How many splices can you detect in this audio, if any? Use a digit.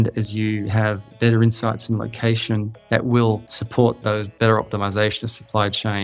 2